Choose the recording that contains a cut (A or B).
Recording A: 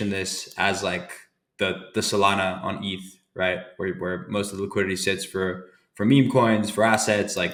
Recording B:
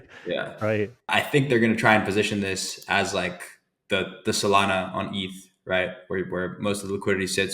B